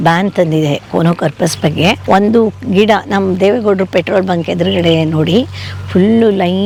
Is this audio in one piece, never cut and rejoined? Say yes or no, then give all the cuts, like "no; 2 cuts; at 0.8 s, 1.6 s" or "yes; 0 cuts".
yes; 0 cuts